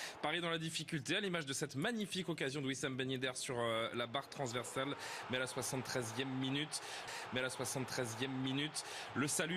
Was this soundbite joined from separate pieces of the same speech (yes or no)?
yes